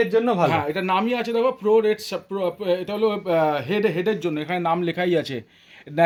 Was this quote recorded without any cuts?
yes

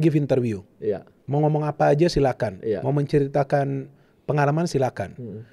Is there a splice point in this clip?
no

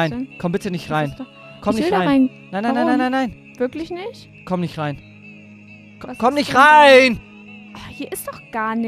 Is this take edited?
yes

